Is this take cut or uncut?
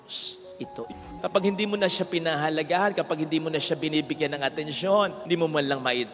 cut